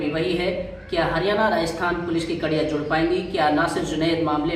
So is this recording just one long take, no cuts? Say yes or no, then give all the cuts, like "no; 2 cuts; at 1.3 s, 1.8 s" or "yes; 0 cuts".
yes; 0 cuts